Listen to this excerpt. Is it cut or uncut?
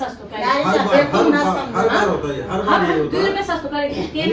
uncut